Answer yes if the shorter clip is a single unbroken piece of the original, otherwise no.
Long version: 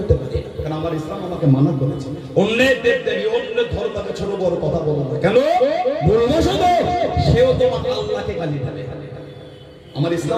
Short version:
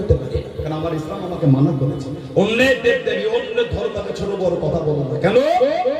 yes